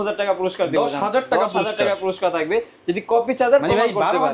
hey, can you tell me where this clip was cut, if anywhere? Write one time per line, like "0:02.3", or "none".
none